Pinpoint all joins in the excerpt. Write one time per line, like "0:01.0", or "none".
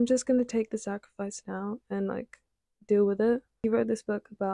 0:03.6